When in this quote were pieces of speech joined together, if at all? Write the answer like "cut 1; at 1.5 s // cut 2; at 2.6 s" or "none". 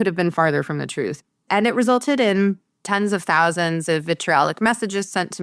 cut 1; at 1.3 s // cut 2; at 2.8 s